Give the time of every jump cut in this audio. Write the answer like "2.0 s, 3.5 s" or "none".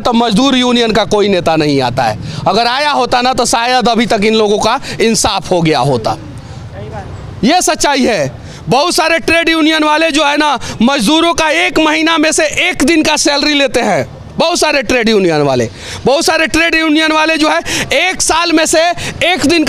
none